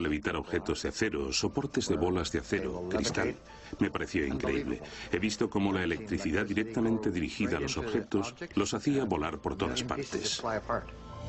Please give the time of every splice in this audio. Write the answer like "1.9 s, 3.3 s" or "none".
5.5 s